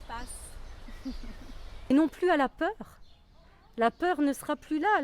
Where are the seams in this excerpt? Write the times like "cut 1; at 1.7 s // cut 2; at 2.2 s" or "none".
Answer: cut 1; at 1.9 s